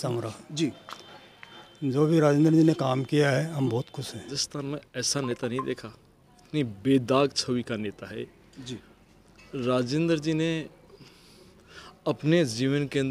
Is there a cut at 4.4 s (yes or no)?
yes